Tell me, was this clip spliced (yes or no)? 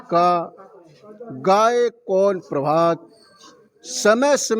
no